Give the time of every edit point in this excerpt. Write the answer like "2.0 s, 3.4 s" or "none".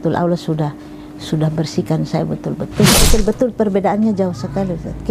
3.1 s